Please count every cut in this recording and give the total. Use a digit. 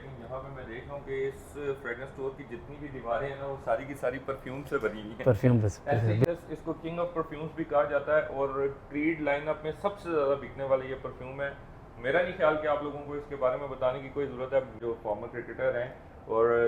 2